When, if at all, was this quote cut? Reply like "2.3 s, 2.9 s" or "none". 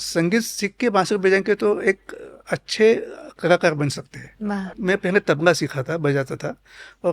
4.7 s